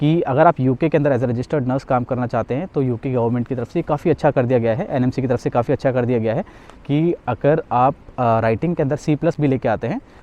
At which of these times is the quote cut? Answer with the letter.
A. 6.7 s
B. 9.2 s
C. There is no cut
C